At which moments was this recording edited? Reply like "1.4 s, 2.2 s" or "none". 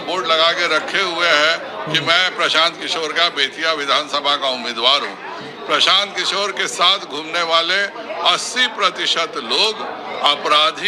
none

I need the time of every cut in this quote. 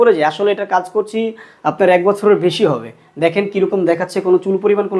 none

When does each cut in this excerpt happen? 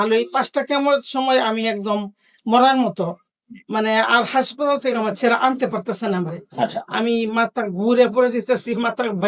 none

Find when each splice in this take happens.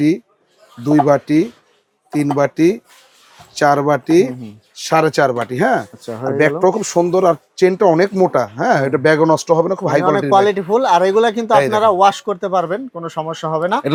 none

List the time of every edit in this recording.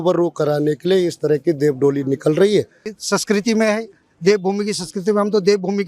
3.0 s

